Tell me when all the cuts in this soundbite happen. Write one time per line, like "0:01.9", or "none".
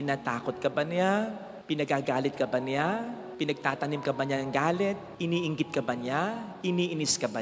none